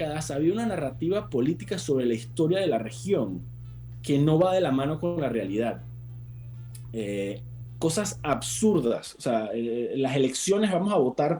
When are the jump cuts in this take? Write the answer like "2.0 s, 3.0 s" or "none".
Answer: none